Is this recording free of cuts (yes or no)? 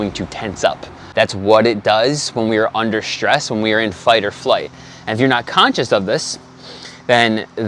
no